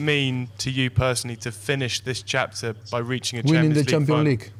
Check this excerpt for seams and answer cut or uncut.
uncut